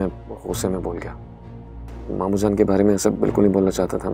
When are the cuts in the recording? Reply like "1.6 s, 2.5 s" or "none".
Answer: none